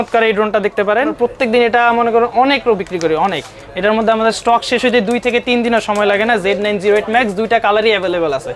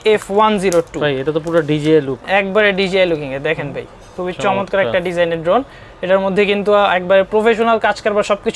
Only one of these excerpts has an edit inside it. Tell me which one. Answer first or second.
first